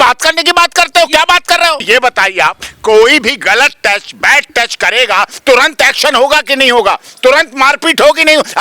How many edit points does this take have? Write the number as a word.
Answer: one